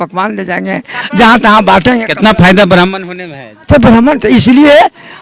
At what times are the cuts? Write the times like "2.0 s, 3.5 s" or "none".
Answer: none